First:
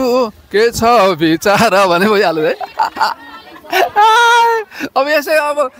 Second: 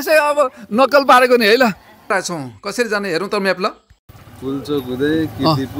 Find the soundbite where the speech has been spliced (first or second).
second